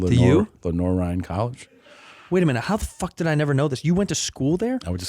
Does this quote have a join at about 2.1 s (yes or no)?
yes